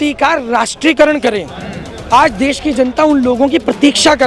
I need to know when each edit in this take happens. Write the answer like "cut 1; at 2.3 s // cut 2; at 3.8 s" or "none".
none